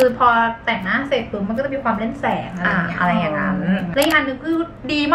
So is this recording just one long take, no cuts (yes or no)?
no